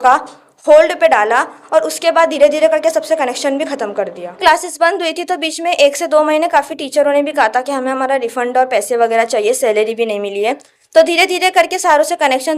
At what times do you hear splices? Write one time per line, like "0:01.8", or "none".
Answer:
0:04.4